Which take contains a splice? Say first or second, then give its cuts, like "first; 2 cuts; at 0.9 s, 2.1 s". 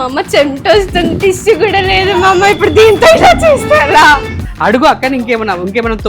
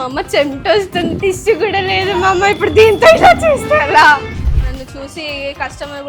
first; 1 cut; at 4.4 s